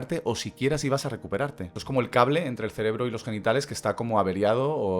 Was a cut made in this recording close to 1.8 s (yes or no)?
yes